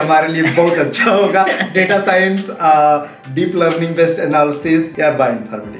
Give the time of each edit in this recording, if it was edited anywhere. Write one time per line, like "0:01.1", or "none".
0:04.9